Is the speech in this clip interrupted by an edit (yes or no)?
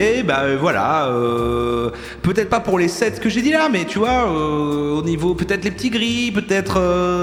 no